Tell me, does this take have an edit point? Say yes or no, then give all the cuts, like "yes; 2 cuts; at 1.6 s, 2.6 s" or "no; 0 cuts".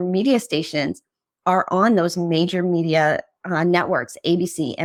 no; 0 cuts